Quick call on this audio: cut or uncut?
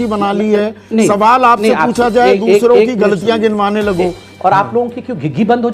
cut